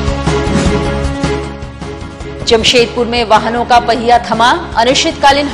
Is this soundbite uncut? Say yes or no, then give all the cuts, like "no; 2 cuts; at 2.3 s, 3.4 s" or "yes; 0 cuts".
yes; 0 cuts